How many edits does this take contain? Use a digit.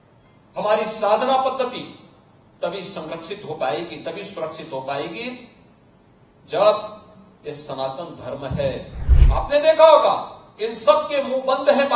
1